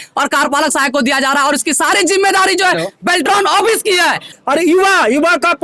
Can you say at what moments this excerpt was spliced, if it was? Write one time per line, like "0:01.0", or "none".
0:04.3